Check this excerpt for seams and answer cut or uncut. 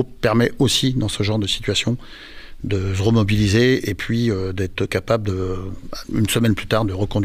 uncut